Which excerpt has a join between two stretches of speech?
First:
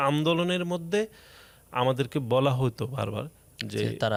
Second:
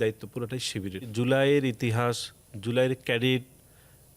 second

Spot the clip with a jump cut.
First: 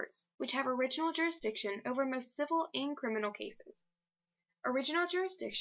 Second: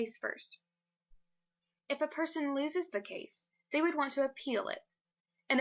first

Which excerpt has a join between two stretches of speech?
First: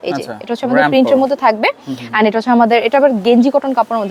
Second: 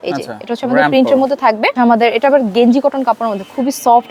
second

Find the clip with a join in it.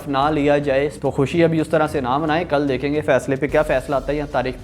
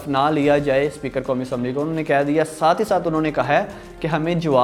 first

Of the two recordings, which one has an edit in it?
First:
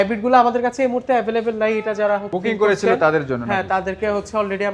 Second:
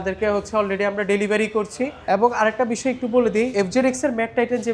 second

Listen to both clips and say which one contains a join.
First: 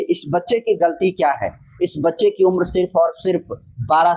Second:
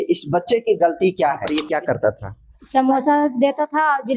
second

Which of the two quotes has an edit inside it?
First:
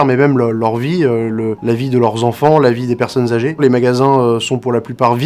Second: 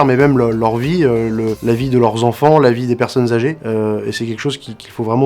first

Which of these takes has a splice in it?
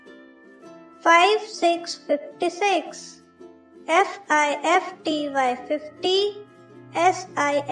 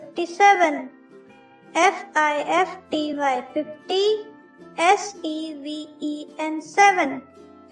first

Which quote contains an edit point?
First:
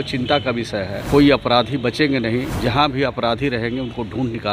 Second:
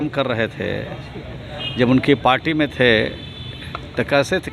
first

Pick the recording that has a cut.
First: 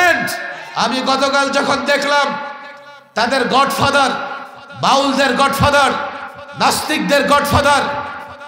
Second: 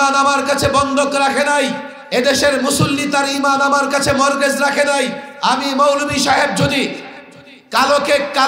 second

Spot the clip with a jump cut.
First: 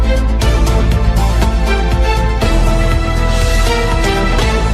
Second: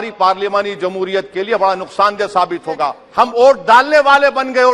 second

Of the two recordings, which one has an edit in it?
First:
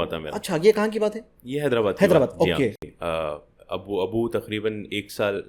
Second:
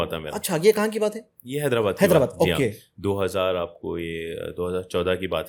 first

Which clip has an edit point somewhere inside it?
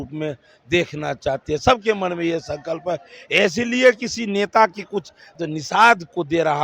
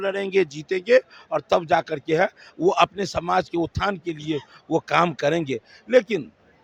first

